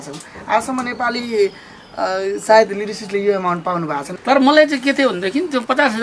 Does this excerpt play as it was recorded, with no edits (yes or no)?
no